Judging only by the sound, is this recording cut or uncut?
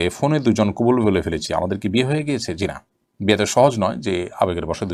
uncut